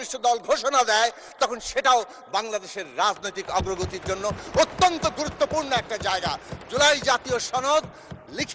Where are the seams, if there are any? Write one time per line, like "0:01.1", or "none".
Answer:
none

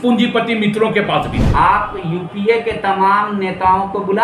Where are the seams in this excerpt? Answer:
0:01.4

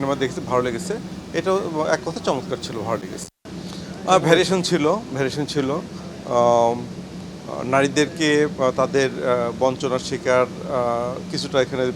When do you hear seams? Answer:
0:03.4

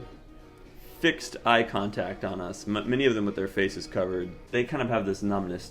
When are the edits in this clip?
0:04.4

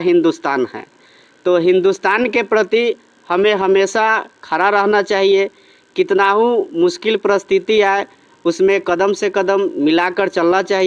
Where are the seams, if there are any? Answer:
none

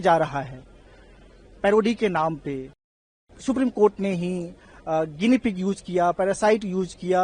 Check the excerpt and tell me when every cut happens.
0:03.2

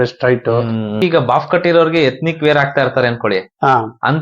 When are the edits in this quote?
0:00.9

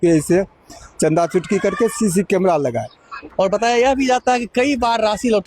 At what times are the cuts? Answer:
0:03.2

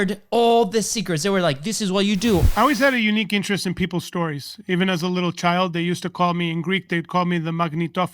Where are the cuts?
0:02.4

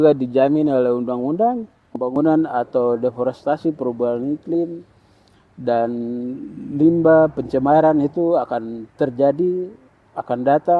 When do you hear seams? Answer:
0:02.1

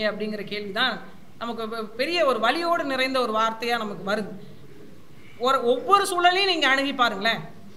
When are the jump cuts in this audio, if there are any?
none

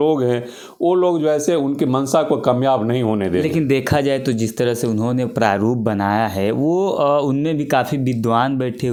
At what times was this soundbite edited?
none

